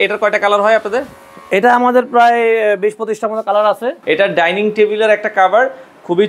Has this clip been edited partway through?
yes; 1 cut; at 4.0 s

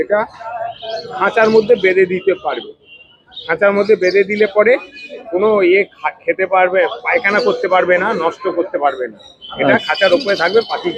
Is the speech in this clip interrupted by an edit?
no; 0 cuts

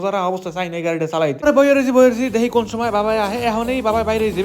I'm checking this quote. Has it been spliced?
yes; 1 cut; at 1.4 s

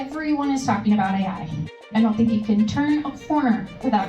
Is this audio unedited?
no; 1 cut; at 1.7 s

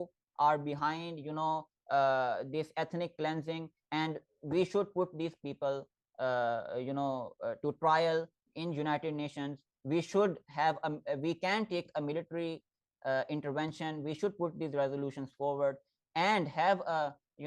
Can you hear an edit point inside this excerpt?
no; 0 cuts

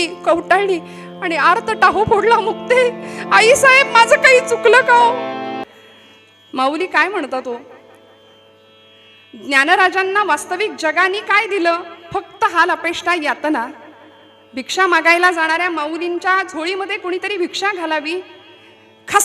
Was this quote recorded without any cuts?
no; 1 cut; at 5.6 s

